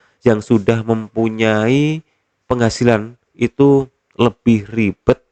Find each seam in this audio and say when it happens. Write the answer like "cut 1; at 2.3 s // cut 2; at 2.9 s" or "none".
none